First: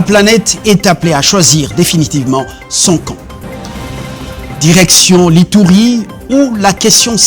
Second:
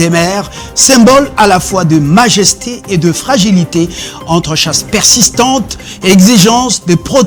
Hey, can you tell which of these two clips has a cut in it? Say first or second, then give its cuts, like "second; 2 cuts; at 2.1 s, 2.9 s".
first; 1 cut; at 3.4 s